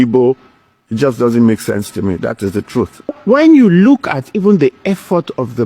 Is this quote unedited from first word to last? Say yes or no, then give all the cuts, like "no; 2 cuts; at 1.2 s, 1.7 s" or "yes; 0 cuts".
no; 1 cut; at 3.1 s